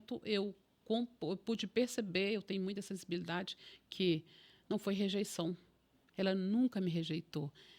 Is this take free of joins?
yes; 0 cuts

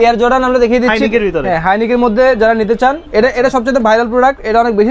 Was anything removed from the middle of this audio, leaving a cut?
yes; 1 cut; at 3.0 s

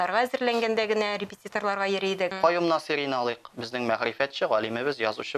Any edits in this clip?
yes; 1 cut; at 2.3 s

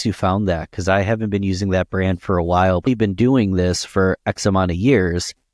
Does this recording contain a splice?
yes; 1 cut; at 2.9 s

